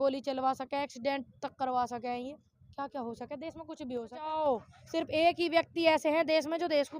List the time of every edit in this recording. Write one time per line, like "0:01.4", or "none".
0:04.3